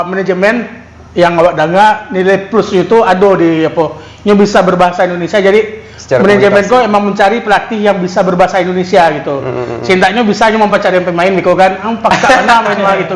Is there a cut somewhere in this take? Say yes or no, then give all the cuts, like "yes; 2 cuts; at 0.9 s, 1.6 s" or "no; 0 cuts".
no; 0 cuts